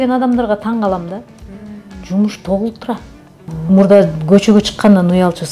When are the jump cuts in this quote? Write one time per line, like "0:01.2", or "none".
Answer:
0:03.5